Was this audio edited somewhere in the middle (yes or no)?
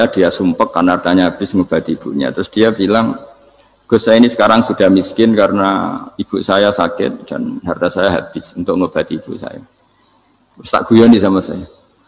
no